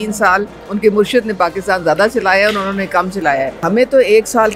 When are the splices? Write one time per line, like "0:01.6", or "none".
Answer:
0:03.6